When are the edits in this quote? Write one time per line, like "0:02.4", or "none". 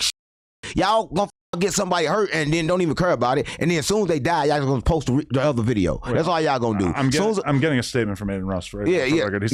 none